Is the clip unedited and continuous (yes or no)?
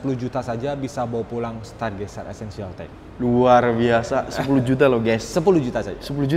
yes